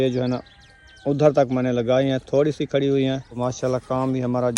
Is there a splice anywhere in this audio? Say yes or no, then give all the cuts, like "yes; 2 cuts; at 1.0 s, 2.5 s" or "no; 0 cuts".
yes; 1 cut; at 3.4 s